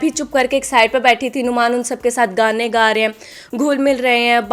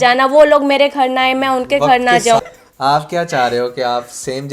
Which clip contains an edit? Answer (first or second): second